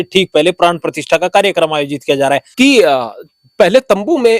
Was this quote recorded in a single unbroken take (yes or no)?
no